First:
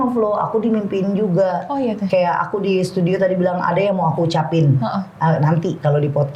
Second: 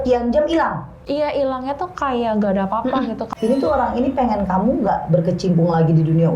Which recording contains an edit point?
second; 2 cuts; at 1.0 s, 3.2 s

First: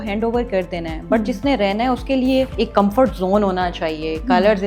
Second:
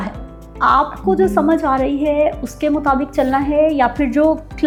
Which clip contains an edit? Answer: first; 1 cut; at 2.5 s

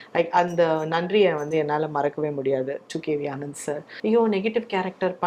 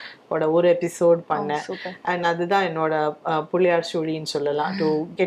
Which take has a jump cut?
first; 1 cut; at 3.9 s

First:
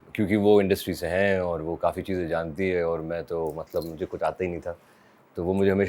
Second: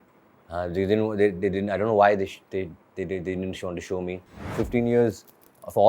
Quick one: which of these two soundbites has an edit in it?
second; 1 cut; at 4.6 s

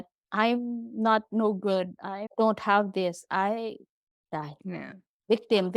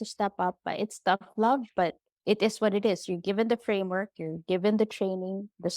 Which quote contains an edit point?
second; 1 cut; at 2.1 s

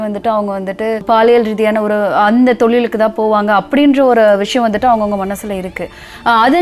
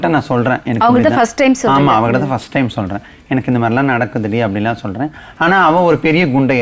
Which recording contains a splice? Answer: first; 1 cut; at 1.0 s

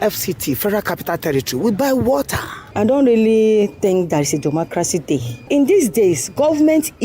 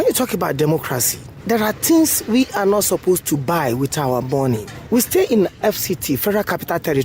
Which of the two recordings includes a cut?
first; 2 cuts; at 2.7 s, 5.5 s

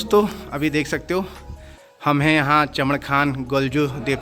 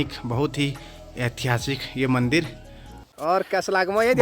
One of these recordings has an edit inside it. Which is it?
second; 1 cut; at 3.1 s

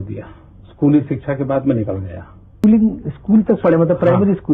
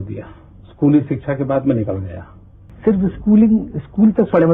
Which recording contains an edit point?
first; 1 cut; at 2.6 s

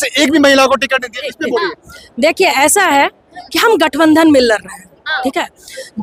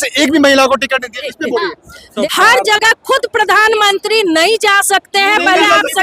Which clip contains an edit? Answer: second; 1 cut; at 2.1 s

